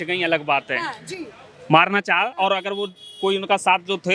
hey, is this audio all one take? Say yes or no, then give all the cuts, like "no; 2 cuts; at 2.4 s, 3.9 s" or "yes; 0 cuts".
yes; 0 cuts